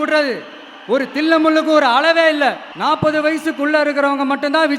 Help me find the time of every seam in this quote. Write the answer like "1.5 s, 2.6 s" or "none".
2.7 s